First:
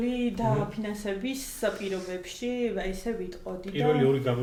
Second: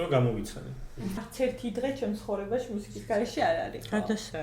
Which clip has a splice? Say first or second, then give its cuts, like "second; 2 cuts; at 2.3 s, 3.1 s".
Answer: second; 1 cut; at 1.2 s